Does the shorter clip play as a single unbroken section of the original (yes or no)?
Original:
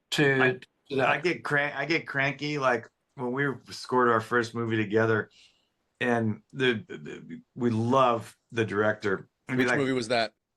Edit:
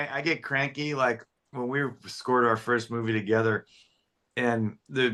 yes